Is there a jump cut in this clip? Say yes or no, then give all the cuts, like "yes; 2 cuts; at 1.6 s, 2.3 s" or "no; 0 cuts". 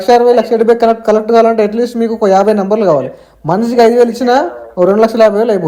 no; 0 cuts